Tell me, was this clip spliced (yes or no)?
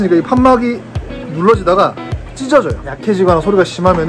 yes